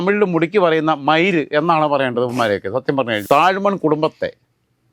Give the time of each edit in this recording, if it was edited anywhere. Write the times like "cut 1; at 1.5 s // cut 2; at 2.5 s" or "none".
cut 1; at 3.2 s